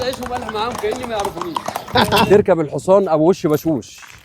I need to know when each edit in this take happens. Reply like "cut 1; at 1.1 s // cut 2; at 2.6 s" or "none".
cut 1; at 2.3 s

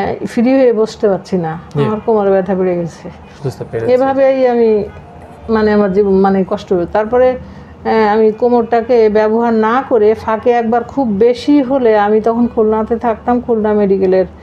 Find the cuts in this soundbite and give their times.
none

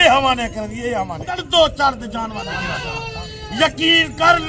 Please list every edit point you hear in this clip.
cut 1; at 1.4 s

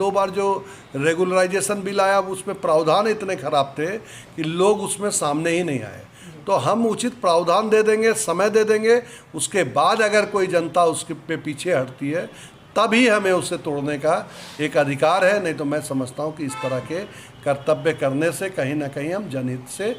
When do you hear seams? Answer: none

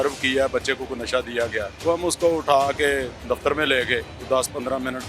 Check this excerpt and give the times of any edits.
cut 1; at 1.7 s // cut 2; at 4.1 s

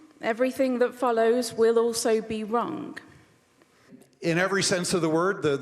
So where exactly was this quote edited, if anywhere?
cut 1; at 4.0 s

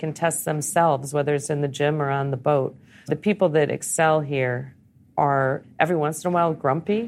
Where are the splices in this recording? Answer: cut 1; at 3.1 s // cut 2; at 5.6 s

